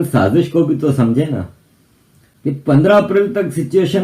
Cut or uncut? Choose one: cut